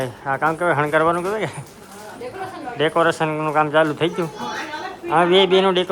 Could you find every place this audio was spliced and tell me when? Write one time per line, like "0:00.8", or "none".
none